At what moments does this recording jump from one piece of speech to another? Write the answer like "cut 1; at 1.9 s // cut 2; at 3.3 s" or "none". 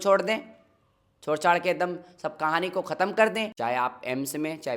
cut 1; at 3.5 s